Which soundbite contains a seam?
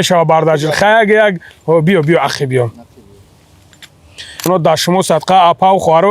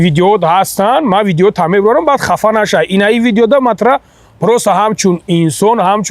first; 1 cut; at 4.5 s

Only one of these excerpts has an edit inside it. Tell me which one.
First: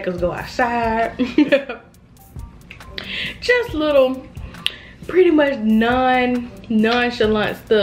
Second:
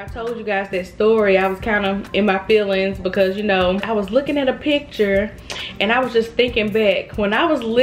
second; 1 cut; at 3.8 s

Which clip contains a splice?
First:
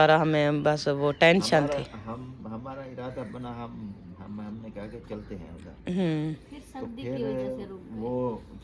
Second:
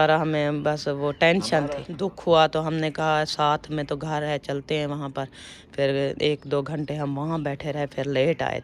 second; 1 cut; at 1.8 s

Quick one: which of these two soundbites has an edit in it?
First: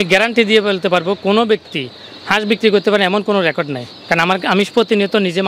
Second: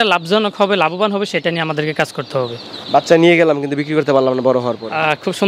second; 1 cut; at 2.7 s

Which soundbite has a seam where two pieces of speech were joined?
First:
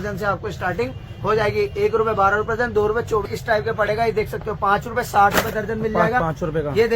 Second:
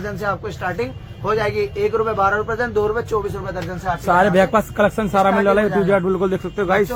first; 1 cut; at 3.3 s

